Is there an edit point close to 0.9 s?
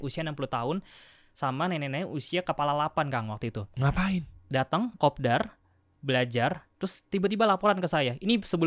no; 0 cuts

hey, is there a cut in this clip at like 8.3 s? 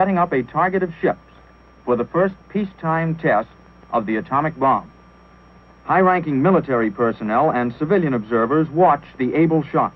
yes; 1 cut; at 8.3 s

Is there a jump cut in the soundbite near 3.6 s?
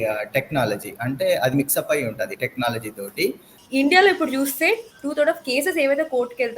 yes; 1 cut; at 3.6 s

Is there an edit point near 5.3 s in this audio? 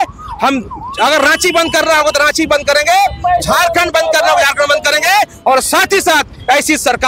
no; 0 cuts

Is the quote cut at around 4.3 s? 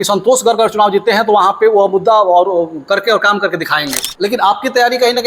yes; 1 cut; at 4.3 s

